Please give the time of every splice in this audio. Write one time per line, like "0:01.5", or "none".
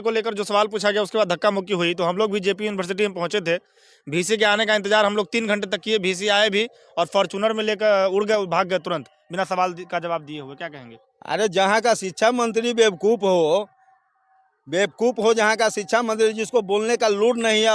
none